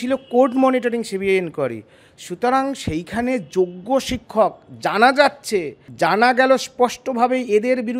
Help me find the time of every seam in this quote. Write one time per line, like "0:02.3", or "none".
0:05.8